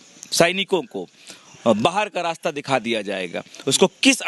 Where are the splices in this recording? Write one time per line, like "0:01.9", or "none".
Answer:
none